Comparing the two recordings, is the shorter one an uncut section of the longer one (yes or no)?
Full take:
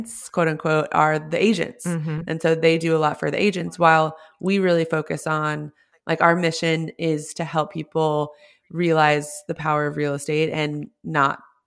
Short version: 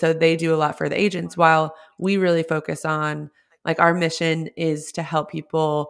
yes